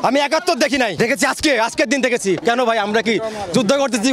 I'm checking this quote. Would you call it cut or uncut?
cut